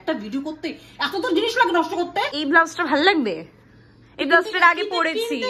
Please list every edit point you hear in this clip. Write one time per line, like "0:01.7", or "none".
0:02.3